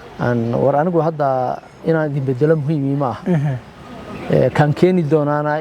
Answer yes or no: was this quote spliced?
no